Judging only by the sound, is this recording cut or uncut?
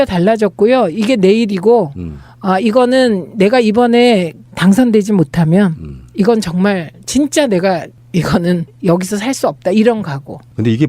cut